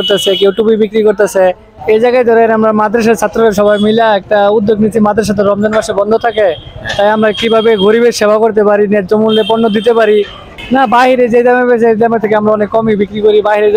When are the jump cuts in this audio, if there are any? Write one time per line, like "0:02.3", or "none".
0:01.7
0:10.4